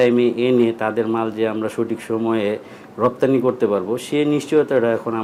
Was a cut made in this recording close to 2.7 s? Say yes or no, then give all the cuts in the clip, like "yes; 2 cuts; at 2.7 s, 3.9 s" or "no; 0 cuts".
no; 0 cuts